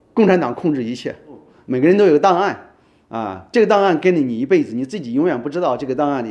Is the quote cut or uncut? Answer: cut